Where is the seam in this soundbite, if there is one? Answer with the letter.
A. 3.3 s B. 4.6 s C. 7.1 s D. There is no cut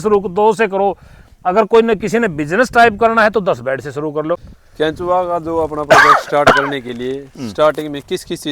B